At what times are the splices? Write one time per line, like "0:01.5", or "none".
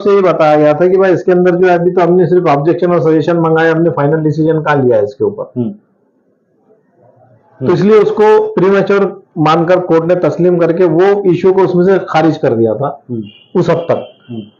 none